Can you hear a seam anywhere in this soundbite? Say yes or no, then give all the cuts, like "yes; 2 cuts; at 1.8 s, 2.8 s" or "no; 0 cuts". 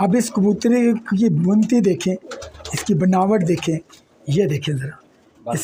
no; 0 cuts